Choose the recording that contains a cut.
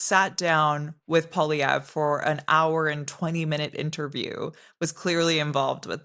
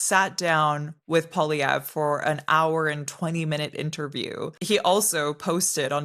second; 1 cut; at 4.5 s

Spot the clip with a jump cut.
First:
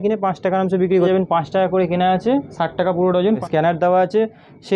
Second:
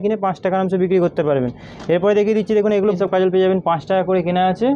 first; 2 cuts; at 1.1 s, 3.4 s

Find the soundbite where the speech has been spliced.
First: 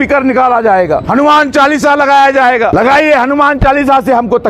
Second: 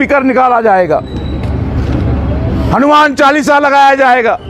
first; 2 cuts; at 1.1 s, 2.7 s

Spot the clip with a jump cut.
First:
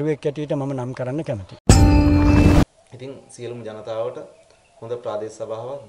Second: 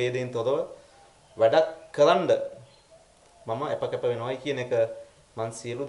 first; 2 cuts; at 1.5 s, 2.6 s

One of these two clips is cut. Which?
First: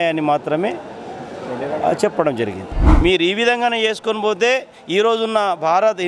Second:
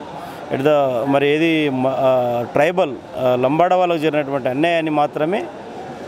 first; 1 cut; at 2.8 s

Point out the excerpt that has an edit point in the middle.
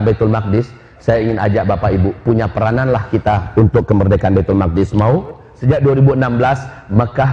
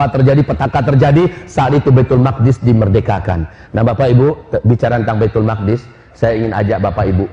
first; 1 cut; at 5.5 s

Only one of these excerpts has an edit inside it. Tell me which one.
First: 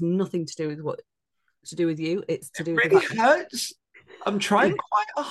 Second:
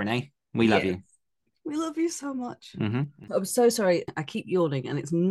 second; 2 cuts; at 3.1 s, 4.2 s

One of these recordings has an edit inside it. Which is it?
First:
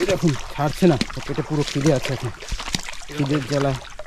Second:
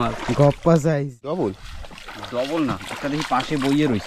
second; 1 cut; at 1.4 s

